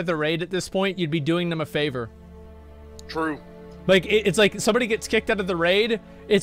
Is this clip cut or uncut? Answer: uncut